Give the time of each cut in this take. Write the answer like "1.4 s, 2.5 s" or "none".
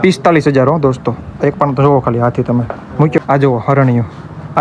3.2 s